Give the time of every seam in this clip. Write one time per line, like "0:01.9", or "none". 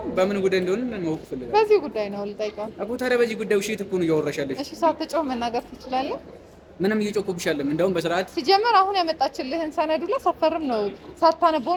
none

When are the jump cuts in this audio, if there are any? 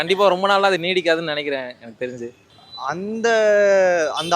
none

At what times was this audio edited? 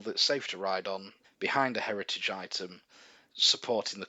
0:01.2

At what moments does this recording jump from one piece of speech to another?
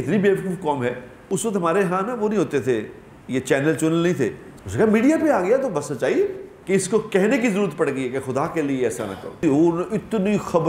0:01.1
0:04.4
0:06.5
0:09.4

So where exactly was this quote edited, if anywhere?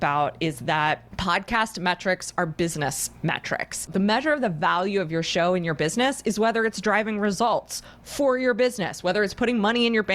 0:01.1
0:03.9

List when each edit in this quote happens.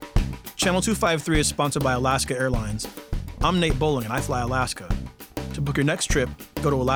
none

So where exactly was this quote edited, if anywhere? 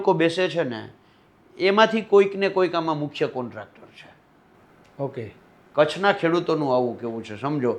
none

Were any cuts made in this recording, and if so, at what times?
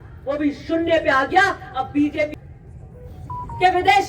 0:02.3

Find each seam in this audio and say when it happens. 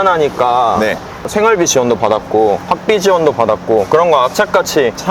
0:01.1

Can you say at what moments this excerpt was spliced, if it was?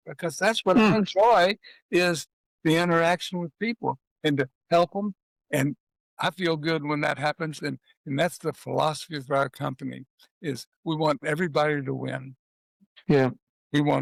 none

